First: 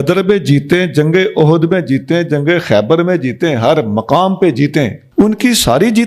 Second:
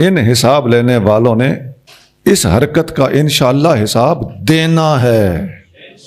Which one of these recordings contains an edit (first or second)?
first